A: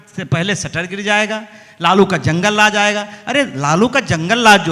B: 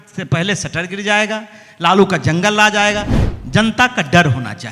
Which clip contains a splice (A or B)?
B